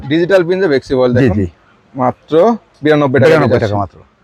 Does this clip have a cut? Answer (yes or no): no